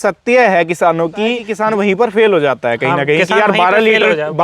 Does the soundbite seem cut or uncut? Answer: cut